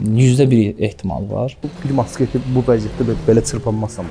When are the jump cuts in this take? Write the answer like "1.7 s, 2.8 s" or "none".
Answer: 1.8 s

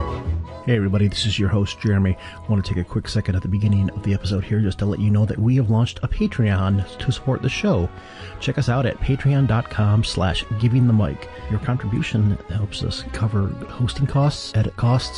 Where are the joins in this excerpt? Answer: 6.7 s

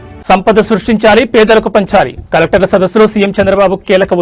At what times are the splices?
none

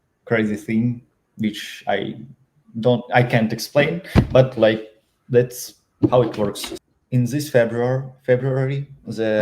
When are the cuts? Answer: 6.7 s

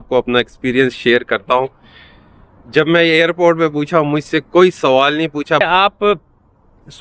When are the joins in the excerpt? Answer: 5.6 s

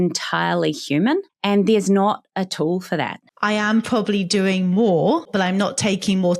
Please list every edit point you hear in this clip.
1.3 s, 3.2 s, 5.3 s

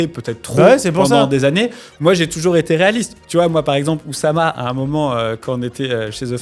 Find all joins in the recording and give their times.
none

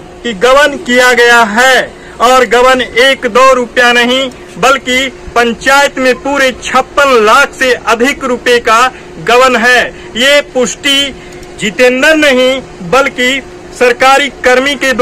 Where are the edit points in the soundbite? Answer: none

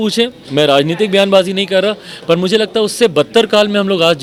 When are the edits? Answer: none

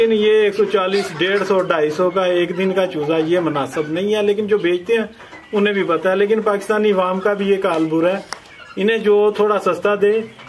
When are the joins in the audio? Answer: none

